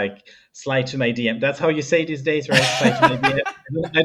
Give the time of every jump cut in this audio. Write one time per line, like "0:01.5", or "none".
none